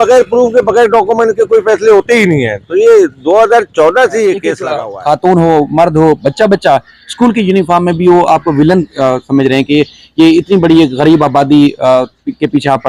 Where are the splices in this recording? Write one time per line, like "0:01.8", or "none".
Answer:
0:04.6